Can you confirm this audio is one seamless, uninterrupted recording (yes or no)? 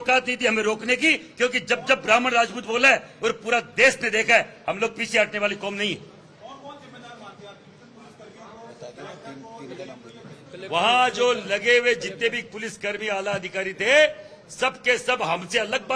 yes